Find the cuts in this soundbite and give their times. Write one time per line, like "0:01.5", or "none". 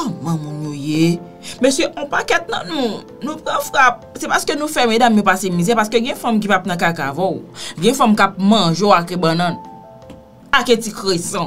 none